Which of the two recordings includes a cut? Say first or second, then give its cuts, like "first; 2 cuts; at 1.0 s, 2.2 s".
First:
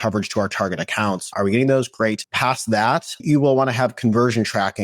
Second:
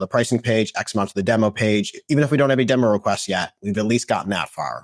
first; 3 cuts; at 1.3 s, 2.3 s, 3.2 s